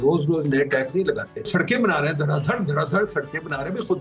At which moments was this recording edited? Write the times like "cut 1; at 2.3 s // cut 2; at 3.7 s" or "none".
cut 1; at 1.5 s